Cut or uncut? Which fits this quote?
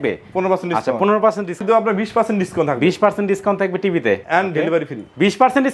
cut